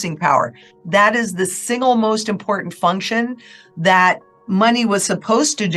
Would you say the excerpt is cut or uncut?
uncut